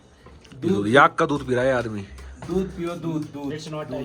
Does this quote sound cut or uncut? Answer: uncut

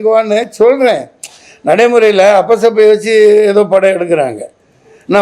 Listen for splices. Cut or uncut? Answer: uncut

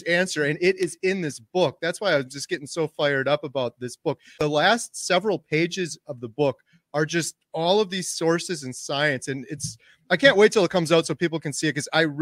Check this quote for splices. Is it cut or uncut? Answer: cut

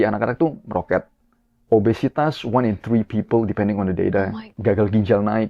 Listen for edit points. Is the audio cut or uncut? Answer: cut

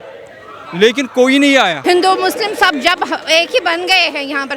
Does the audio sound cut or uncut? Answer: cut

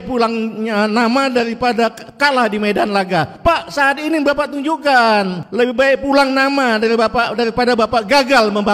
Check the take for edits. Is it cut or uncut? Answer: cut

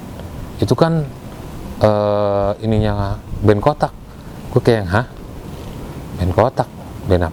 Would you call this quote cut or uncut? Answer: uncut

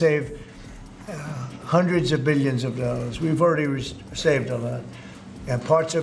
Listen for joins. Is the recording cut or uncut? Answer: uncut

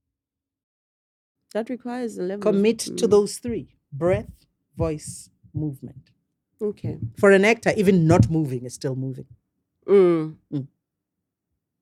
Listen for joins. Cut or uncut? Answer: uncut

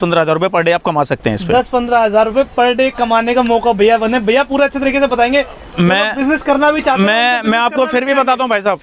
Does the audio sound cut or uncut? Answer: uncut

